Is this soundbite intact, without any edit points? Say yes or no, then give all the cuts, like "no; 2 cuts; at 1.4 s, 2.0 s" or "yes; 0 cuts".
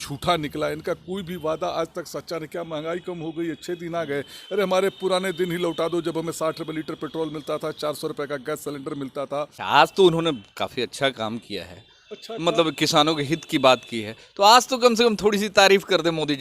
no; 1 cut; at 9.5 s